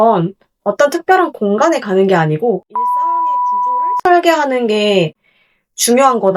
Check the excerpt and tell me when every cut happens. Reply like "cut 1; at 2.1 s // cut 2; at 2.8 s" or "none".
none